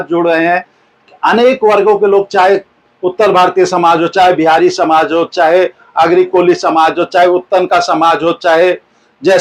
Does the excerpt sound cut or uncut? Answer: uncut